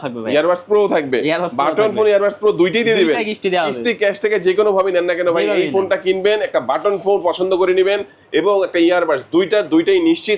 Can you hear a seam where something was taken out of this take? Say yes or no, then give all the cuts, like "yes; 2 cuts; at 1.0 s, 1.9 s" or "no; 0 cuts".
no; 0 cuts